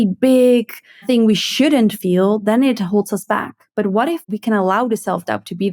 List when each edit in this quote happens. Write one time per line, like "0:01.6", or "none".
0:01.0
0:04.2